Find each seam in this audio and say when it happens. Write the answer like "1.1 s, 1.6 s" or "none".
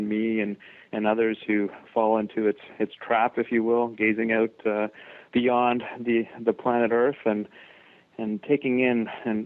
2.1 s